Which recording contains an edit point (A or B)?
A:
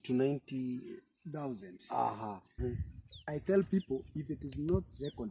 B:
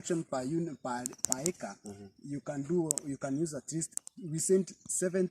A